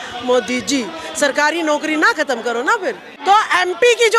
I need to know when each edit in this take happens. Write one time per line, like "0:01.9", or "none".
0:03.1